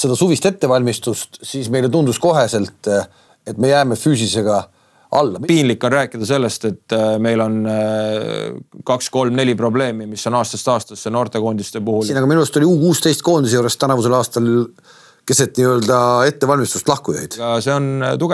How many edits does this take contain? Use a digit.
3